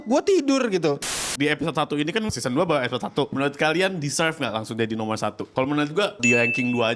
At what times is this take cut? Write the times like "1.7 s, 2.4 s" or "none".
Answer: 1.1 s, 2.3 s, 3.3 s, 5.4 s, 6.2 s